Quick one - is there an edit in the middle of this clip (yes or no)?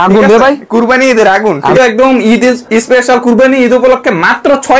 yes